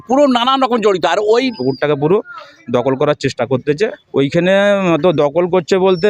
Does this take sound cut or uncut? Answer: cut